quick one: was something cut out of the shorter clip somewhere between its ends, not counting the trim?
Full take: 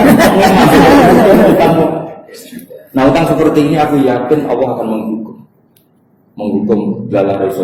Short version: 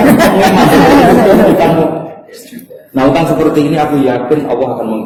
no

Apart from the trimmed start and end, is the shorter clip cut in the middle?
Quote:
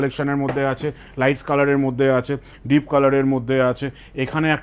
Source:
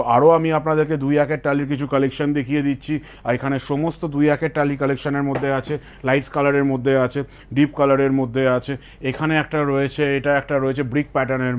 no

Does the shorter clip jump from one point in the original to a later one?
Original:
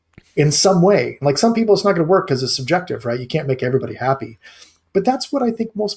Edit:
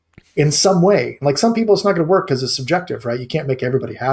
no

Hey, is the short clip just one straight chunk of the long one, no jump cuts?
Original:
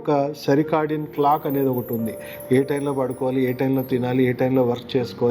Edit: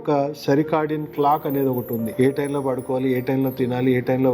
no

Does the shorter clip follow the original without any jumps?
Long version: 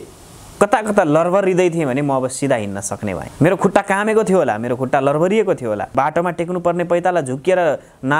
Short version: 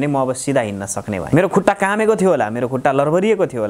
no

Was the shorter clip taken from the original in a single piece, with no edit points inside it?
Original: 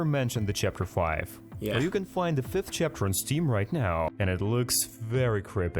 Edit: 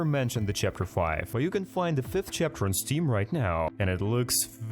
no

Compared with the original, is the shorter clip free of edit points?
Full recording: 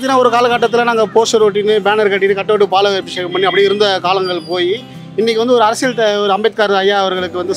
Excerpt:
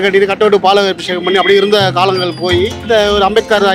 no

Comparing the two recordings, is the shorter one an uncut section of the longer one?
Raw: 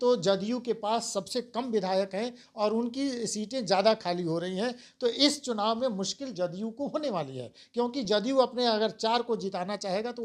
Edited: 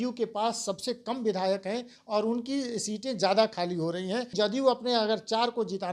no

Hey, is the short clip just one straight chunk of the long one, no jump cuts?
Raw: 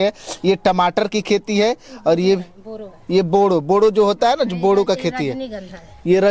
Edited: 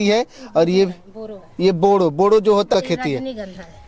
no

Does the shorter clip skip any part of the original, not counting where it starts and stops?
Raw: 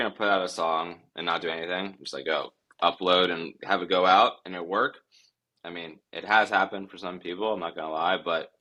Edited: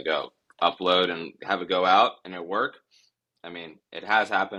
no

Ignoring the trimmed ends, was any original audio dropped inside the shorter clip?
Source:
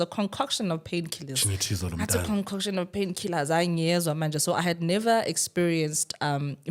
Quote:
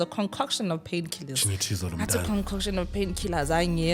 no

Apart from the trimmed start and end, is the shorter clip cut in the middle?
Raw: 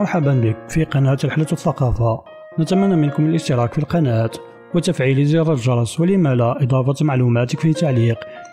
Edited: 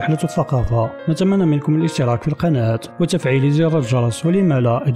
yes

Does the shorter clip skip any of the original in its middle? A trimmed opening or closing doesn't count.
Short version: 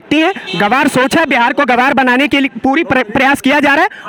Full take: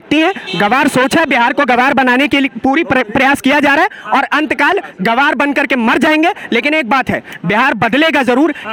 no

